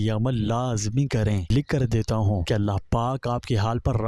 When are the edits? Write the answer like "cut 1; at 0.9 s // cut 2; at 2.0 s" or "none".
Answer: cut 1; at 1.4 s // cut 2; at 2.4 s